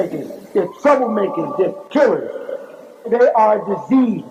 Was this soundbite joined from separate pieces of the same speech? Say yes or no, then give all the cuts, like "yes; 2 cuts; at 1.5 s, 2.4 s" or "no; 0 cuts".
no; 0 cuts